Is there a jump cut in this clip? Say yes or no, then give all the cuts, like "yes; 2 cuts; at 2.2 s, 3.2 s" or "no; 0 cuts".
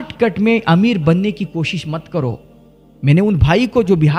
no; 0 cuts